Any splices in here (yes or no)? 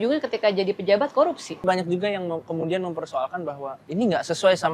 yes